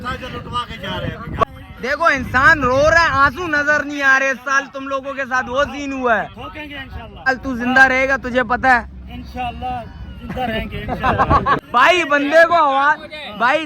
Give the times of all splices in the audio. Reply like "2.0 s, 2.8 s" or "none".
1.4 s, 7.3 s, 11.6 s